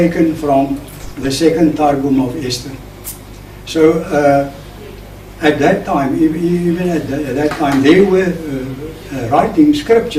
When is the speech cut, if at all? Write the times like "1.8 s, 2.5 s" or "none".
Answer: 8.5 s

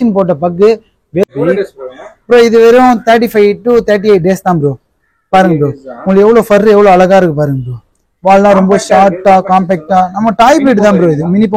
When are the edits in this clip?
1.2 s

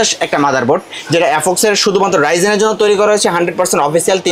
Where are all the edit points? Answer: none

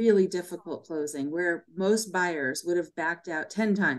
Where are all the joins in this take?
none

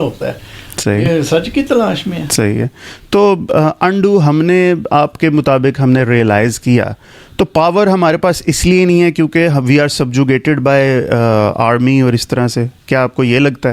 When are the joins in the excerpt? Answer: none

